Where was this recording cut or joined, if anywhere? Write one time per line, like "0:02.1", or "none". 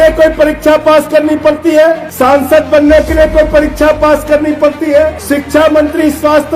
0:02.1
0:05.2